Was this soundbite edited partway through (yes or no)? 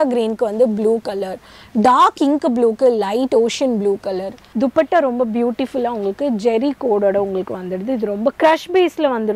yes